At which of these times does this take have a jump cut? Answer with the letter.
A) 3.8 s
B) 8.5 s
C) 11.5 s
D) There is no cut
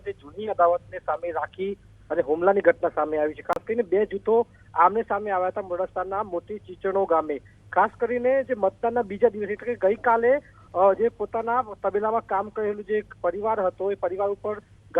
D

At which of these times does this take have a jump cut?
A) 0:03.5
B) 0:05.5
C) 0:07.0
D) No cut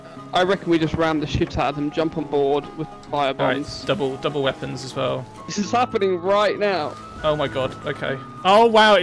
B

